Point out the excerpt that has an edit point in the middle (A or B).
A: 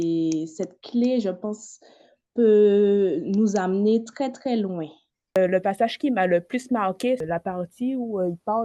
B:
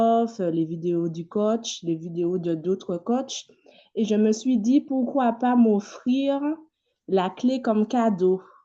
A